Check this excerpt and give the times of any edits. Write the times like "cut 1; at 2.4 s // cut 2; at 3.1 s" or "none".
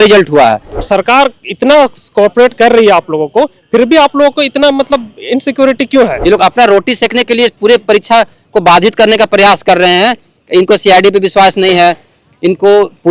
cut 1; at 0.8 s // cut 2; at 6.2 s